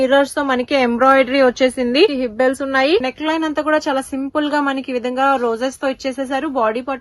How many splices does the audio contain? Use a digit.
2